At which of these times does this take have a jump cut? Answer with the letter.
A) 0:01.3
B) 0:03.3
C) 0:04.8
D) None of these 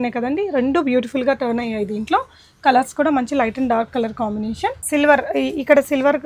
C